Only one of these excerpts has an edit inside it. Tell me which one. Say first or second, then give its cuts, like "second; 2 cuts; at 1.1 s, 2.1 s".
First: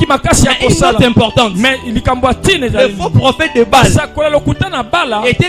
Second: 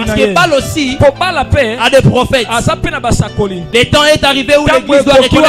second; 1 cut; at 3.6 s